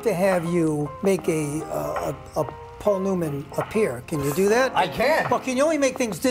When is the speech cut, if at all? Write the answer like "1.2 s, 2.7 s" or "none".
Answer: 0.9 s